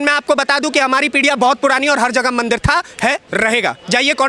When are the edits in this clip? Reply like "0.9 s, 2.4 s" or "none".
none